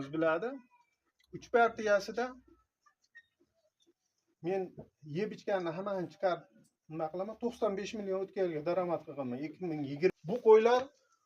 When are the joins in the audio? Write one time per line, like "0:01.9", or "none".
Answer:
0:10.1